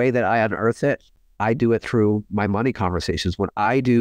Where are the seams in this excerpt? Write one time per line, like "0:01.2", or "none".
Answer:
0:01.2